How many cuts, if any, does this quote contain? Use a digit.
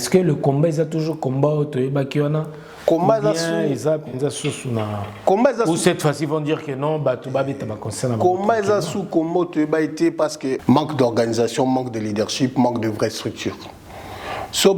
1